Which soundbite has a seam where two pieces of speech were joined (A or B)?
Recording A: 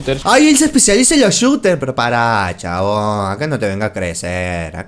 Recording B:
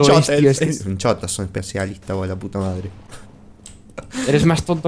B